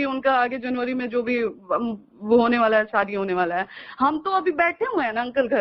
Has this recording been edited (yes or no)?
no